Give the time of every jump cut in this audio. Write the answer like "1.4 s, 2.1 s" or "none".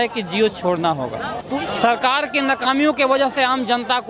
1.4 s